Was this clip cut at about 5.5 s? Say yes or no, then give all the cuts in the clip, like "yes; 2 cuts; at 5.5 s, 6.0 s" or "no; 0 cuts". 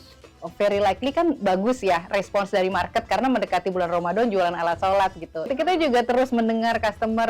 yes; 1 cut; at 5.5 s